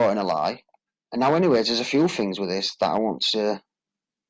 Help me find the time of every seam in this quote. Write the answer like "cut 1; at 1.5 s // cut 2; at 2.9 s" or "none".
cut 1; at 2.1 s